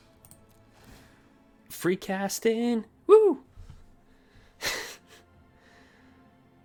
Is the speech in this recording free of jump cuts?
yes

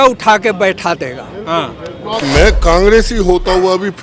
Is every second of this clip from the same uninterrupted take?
no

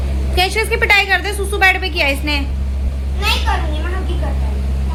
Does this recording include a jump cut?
no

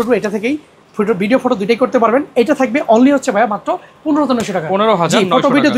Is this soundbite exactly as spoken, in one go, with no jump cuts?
yes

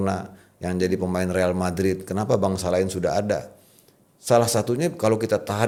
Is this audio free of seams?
yes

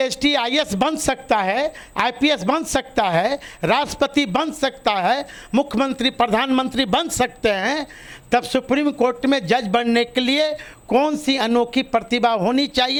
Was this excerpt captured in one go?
yes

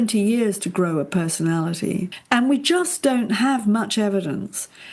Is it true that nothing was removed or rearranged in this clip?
no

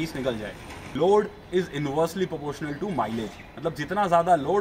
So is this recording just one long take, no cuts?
no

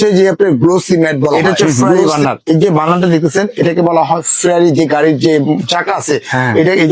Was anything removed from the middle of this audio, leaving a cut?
yes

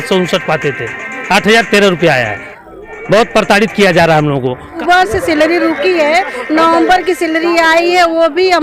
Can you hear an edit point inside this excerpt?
yes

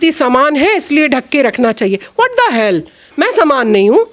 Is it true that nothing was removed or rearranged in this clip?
yes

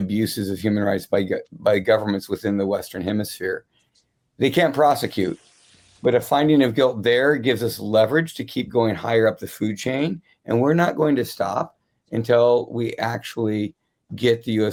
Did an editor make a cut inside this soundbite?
no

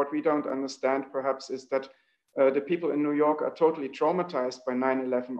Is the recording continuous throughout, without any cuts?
yes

